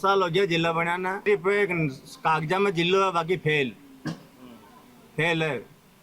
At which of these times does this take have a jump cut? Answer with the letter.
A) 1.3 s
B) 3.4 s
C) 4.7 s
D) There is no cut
A